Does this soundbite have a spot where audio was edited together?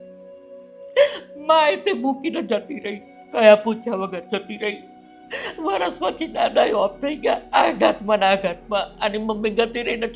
yes; 1 cut; at 3.3 s

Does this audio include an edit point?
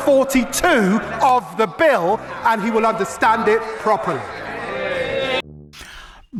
no; 0 cuts

